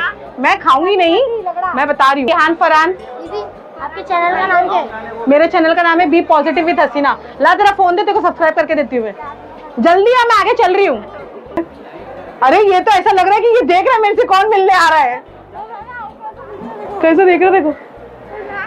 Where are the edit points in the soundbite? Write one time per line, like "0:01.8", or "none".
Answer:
0:02.3
0:11.6